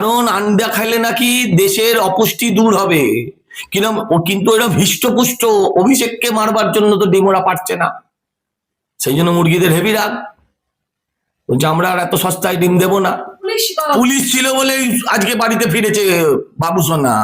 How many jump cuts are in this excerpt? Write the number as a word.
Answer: one